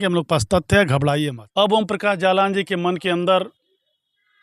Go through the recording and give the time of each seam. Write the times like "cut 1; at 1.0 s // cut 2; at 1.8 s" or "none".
cut 1; at 1.4 s